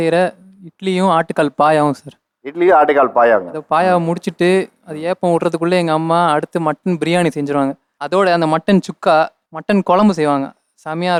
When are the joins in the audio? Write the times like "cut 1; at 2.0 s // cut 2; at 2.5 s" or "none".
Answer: none